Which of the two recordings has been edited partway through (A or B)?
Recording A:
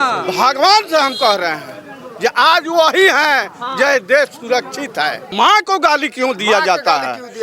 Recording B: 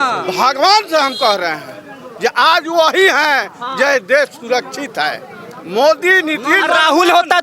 A